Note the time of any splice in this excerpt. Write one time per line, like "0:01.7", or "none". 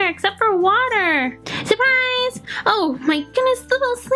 none